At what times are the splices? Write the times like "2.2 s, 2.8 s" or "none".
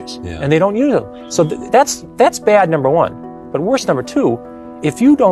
none